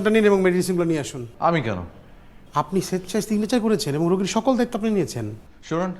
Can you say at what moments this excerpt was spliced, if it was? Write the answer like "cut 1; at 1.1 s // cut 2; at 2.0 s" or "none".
none